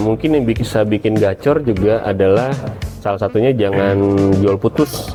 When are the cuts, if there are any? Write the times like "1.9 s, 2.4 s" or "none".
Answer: none

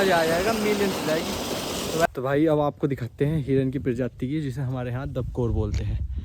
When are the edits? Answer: 2.1 s

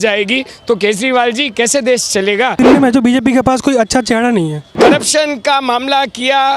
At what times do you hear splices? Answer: 2.6 s, 4.7 s

